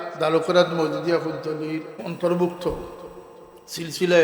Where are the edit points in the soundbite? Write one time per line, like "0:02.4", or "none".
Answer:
0:02.0